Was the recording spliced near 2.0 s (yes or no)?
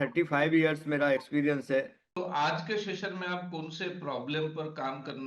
yes